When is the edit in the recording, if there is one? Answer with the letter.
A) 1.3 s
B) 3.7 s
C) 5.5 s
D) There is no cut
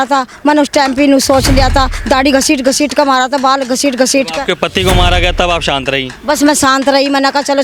D